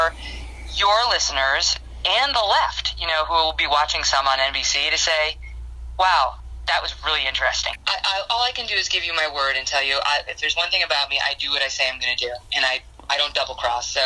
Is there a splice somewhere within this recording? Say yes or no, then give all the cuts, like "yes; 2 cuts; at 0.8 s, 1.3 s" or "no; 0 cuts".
no; 0 cuts